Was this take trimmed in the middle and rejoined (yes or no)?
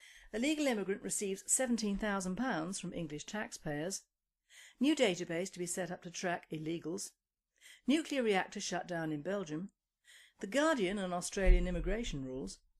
yes